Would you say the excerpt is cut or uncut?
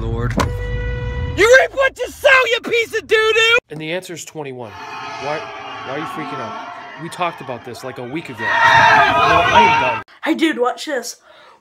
uncut